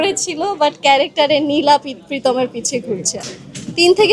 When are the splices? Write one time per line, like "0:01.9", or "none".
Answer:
0:03.2